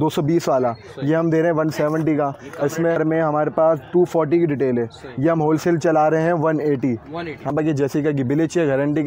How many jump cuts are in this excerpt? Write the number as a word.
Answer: two